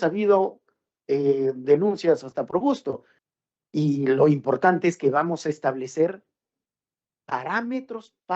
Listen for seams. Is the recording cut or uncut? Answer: uncut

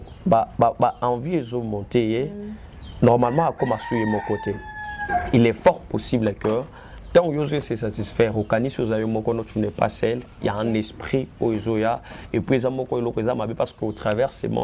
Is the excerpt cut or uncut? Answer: uncut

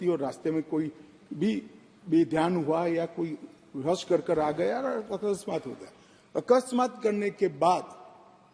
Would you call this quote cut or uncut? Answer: uncut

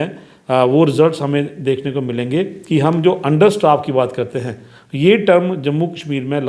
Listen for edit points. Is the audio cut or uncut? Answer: uncut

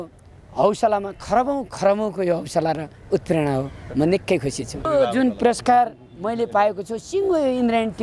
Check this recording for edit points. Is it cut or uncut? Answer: cut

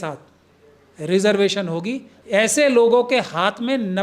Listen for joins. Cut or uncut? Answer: cut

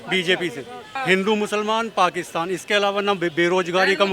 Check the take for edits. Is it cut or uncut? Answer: cut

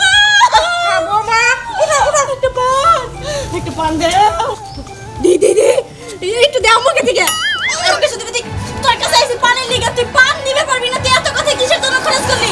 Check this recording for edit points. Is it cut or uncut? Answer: cut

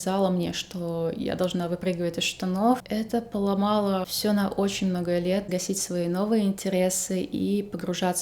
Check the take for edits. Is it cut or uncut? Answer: cut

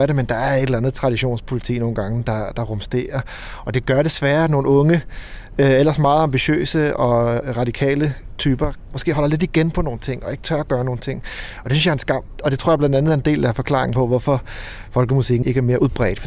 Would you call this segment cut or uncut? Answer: cut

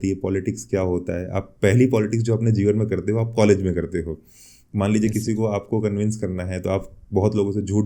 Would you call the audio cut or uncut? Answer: uncut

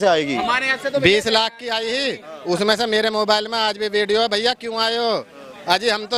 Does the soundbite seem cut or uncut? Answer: uncut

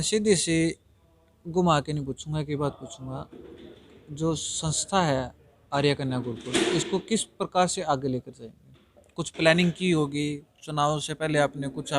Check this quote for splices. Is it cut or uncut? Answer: uncut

